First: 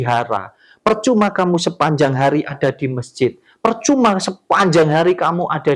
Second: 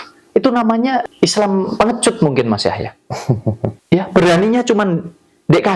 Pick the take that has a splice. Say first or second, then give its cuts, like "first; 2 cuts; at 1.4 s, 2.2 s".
second; 2 cuts; at 1.1 s, 3.8 s